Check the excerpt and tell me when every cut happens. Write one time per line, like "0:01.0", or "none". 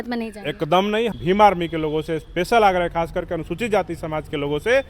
0:01.1